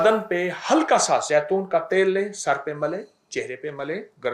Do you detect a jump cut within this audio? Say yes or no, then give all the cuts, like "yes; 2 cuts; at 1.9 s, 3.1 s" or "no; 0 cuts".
no; 0 cuts